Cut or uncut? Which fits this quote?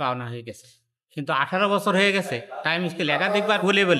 uncut